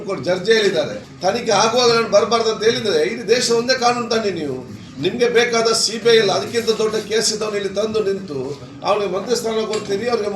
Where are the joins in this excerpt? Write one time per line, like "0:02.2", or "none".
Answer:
none